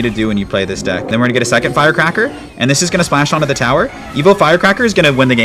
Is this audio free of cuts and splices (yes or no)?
no